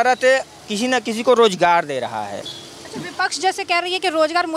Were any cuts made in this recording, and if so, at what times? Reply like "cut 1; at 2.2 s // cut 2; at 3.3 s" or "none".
cut 1; at 2.4 s